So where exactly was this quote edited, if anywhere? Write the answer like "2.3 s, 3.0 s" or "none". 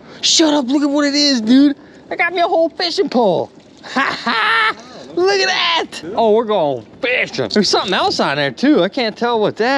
none